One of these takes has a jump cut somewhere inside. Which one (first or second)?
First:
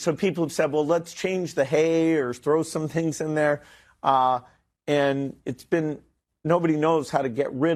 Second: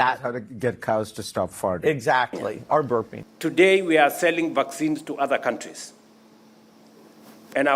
second